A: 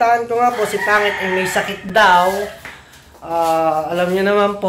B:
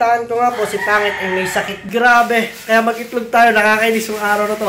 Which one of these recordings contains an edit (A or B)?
B